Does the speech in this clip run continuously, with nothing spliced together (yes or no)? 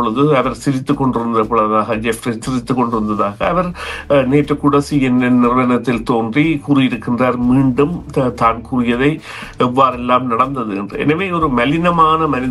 yes